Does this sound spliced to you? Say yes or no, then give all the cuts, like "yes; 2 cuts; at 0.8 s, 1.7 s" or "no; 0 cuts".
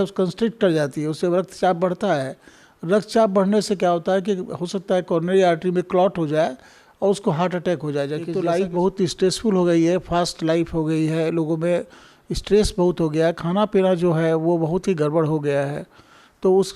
yes; 1 cut; at 8.3 s